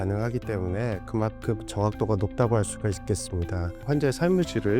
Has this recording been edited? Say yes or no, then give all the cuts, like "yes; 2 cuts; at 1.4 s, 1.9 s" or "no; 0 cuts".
yes; 1 cut; at 3.8 s